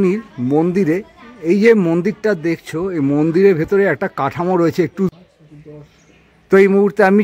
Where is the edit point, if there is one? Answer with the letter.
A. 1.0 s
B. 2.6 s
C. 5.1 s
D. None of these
C